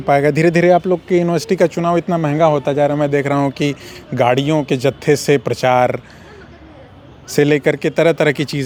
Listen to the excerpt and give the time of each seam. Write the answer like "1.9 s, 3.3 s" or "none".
none